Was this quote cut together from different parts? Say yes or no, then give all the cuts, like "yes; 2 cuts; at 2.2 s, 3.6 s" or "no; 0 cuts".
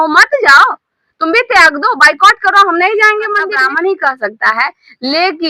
yes; 1 cut; at 3.5 s